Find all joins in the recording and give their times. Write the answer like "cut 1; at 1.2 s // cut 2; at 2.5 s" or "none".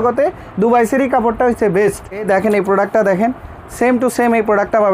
cut 1; at 2.2 s